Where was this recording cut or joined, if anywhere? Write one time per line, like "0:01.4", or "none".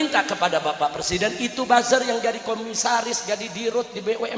none